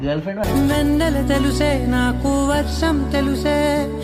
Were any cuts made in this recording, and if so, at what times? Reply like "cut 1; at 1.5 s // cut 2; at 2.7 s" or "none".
none